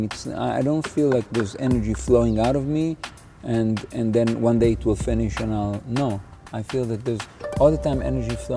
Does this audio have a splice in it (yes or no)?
no